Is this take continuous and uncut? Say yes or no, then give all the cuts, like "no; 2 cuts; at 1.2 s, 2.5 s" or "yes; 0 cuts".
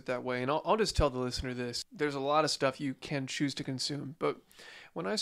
no; 1 cut; at 1.8 s